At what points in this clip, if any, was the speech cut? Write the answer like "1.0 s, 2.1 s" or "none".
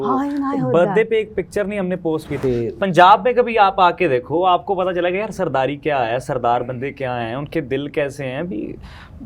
2.4 s